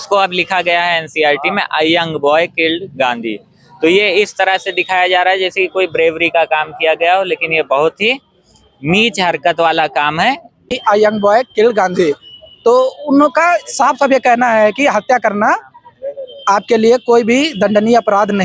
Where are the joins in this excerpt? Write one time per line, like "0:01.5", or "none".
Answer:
0:10.7